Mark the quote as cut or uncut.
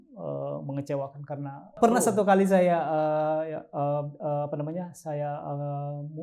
cut